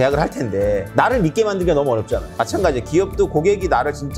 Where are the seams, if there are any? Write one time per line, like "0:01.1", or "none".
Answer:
0:02.3